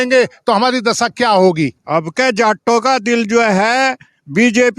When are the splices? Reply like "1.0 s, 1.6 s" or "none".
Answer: 1.8 s

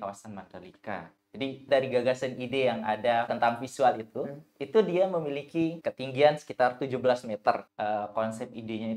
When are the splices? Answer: 1.7 s, 3.3 s, 5.8 s, 7.7 s

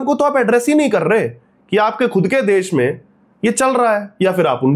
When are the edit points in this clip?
none

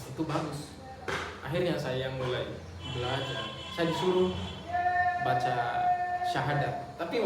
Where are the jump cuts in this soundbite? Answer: none

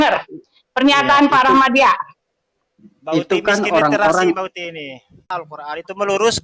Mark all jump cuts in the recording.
5.2 s

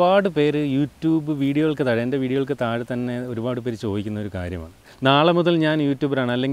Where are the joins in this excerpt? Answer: 4.9 s

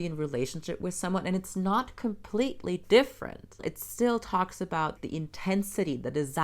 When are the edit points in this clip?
3.6 s, 5.0 s

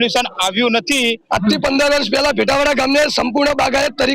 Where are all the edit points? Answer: 1.2 s

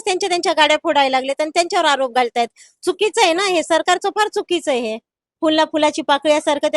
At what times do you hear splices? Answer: 5.2 s

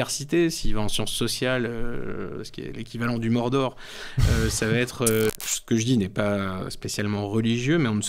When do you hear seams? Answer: 5.3 s

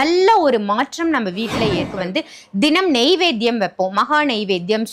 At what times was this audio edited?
1.8 s

